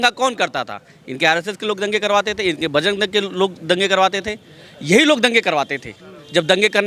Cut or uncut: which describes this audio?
uncut